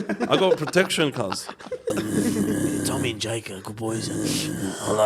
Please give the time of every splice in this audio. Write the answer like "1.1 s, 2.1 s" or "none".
1.9 s